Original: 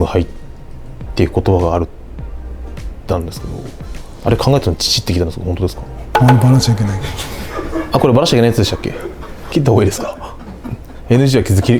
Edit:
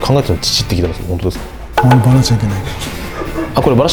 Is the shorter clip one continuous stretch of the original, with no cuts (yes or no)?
yes